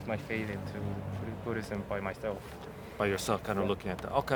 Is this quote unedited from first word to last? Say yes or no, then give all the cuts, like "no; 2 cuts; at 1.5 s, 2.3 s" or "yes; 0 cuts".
yes; 0 cuts